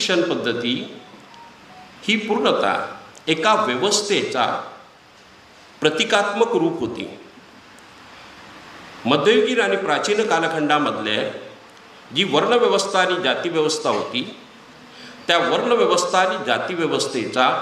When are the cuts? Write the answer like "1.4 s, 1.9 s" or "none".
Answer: none